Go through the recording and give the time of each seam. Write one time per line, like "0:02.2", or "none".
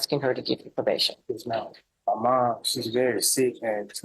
0:01.8

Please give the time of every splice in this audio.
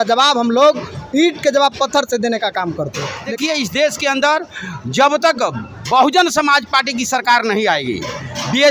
0:03.3

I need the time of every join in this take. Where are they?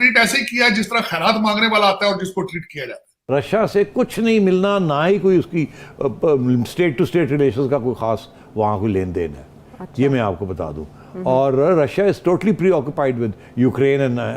0:03.1

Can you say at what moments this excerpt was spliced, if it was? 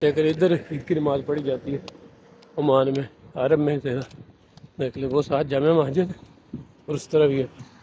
none

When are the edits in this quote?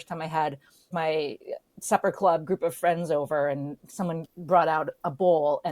0:00.9
0:04.3

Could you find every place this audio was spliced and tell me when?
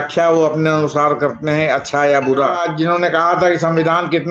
0:02.6

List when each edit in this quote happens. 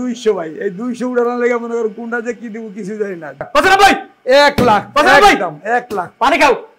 0:03.5

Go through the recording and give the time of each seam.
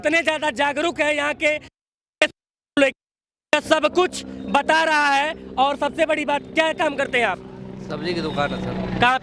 none

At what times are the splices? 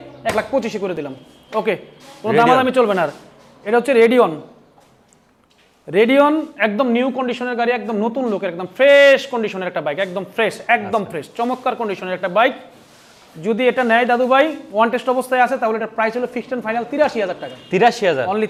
none

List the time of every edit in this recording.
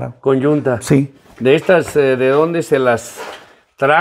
0:01.2

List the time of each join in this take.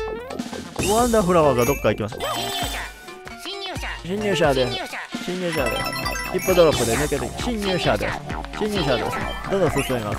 0:02.2

